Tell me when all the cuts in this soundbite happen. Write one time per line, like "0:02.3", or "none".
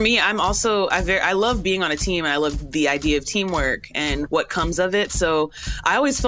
0:04.3